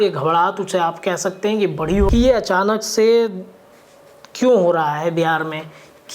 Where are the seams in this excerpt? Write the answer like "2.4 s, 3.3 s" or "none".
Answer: 2.1 s